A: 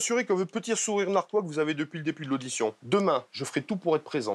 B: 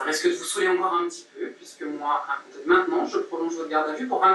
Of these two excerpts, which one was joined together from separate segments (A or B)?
A